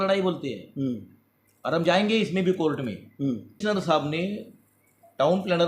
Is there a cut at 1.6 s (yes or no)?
no